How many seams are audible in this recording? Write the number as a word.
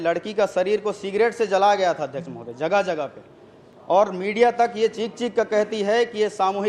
zero